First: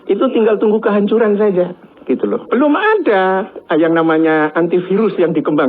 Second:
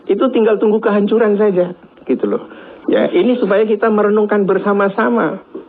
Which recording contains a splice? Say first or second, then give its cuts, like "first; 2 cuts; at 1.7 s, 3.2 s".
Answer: first; 1 cut; at 2.5 s